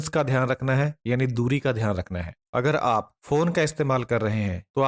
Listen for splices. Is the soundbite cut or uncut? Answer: uncut